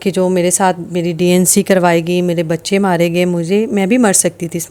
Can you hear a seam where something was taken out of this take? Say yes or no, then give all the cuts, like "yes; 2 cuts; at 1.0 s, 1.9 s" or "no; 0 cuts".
no; 0 cuts